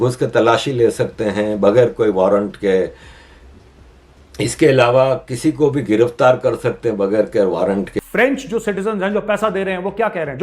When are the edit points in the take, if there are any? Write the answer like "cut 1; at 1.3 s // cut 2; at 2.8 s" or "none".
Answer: cut 1; at 7.9 s